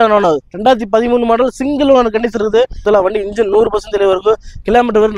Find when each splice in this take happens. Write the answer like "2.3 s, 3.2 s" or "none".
2.8 s